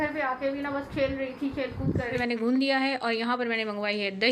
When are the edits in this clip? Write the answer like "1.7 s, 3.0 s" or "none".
2.2 s